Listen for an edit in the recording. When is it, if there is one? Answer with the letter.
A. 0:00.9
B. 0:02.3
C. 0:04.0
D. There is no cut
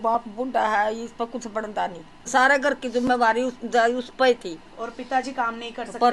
B